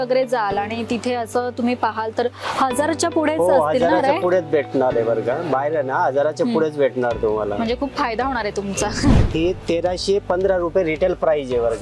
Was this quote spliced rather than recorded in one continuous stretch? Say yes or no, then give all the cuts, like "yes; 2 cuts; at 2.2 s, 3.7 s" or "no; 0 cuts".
yes; 1 cut; at 9.2 s